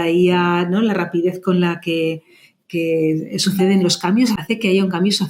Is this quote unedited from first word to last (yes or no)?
no